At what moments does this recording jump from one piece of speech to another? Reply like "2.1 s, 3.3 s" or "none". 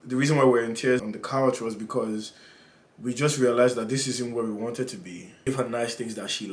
1.0 s, 5.5 s